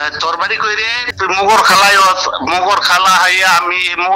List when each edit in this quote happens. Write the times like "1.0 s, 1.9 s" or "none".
1.0 s